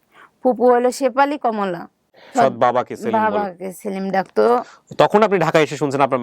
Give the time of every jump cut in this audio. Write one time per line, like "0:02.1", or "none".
0:02.3